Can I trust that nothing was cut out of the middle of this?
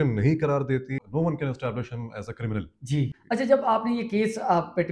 no; 2 cuts; at 1.0 s, 3.2 s

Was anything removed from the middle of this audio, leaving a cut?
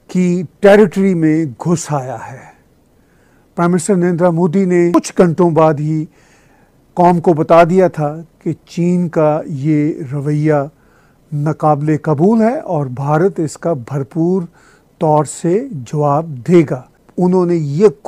yes; 2 cuts; at 4.9 s, 17.0 s

